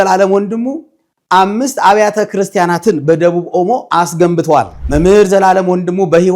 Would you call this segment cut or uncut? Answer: cut